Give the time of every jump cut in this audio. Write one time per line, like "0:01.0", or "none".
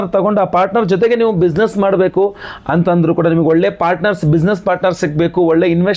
none